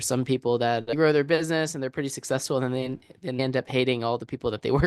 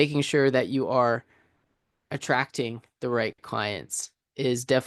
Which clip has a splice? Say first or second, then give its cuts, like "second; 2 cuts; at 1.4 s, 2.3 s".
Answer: first; 2 cuts; at 0.9 s, 3.4 s